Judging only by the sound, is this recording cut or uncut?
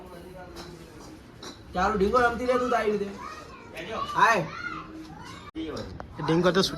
cut